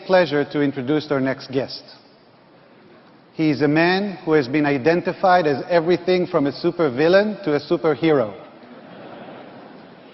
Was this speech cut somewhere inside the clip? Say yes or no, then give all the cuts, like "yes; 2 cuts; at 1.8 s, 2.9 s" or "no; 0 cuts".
no; 0 cuts